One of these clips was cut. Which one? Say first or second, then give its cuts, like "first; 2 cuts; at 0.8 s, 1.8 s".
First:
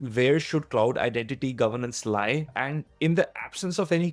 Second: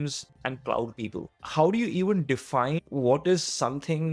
second; 1 cut; at 1.3 s